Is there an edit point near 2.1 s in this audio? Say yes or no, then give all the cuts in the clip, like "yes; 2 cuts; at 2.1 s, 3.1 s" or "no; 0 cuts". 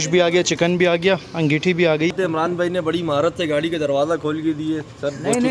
yes; 1 cut; at 2.1 s